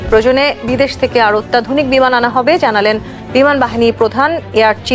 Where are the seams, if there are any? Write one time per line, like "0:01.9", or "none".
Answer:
none